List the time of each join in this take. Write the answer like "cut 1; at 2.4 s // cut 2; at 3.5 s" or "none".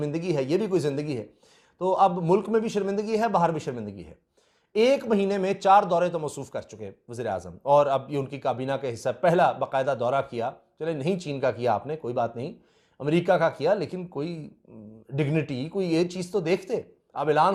none